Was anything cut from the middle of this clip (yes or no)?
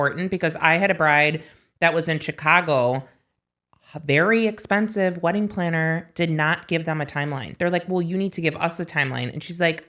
no